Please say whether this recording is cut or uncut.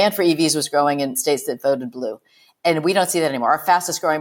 cut